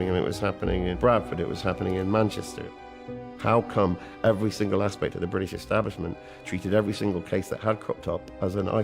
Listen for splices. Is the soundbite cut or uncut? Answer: cut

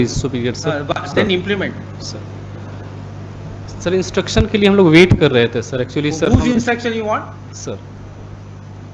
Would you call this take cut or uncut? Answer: uncut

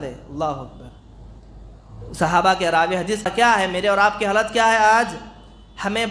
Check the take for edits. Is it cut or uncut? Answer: cut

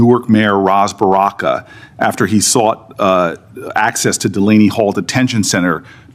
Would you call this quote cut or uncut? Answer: uncut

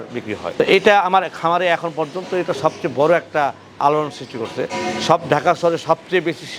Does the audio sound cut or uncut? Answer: uncut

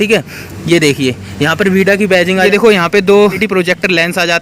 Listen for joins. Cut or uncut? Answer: cut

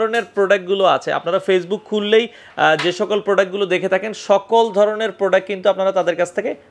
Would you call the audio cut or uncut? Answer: uncut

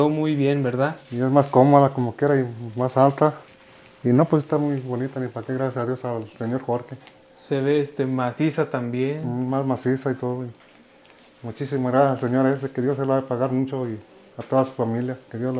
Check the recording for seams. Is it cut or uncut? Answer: uncut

